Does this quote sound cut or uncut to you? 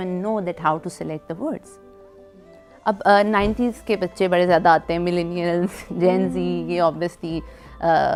uncut